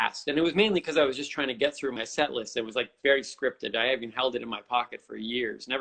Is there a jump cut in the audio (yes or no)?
yes